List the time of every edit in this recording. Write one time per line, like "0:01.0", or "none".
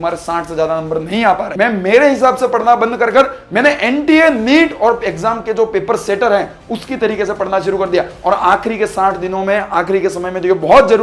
0:01.5